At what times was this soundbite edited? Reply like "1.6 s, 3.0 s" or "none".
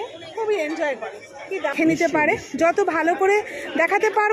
1.7 s